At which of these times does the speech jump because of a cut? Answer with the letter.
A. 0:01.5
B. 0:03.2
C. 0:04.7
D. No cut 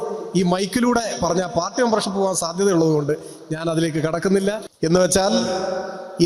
C